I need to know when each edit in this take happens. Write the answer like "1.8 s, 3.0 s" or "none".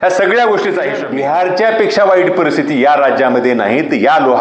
1.1 s